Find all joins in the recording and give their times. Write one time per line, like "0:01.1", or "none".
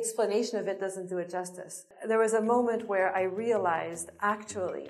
0:01.8